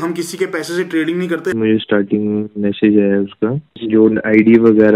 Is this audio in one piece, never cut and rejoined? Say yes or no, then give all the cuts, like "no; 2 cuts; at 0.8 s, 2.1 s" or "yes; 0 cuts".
no; 2 cuts; at 1.5 s, 3.7 s